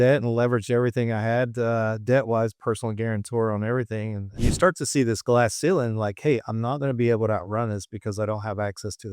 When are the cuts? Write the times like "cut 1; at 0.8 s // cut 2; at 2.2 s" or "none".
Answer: cut 1; at 4.4 s